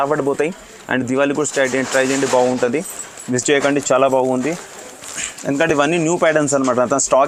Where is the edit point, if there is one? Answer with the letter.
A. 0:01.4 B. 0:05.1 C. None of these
C